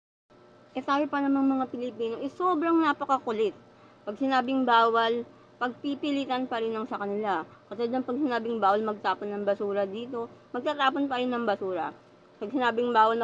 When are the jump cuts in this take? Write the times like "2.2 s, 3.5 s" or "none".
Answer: none